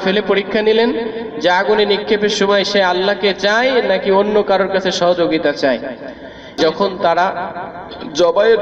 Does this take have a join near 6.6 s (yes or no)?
yes